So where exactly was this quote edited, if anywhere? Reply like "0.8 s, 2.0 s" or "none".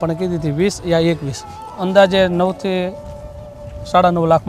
1.5 s